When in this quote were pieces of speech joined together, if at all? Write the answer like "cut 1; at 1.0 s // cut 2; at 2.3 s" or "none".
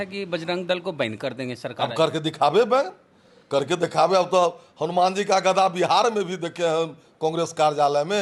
none